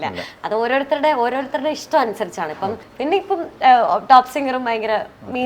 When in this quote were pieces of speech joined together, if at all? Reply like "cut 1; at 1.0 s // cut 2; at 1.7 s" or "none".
cut 1; at 2.9 s